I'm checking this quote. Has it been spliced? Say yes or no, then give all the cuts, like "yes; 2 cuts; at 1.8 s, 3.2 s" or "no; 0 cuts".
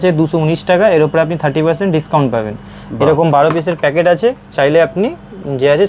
no; 0 cuts